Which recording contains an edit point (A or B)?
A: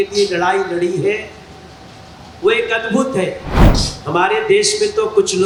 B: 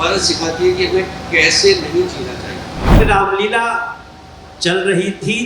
B